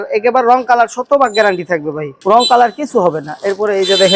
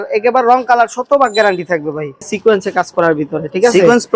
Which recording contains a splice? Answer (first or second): second